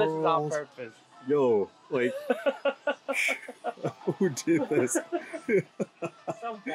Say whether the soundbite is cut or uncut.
uncut